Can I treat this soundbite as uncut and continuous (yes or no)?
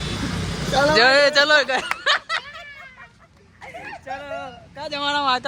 yes